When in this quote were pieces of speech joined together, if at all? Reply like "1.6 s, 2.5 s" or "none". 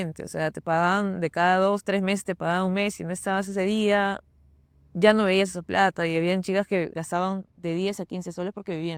none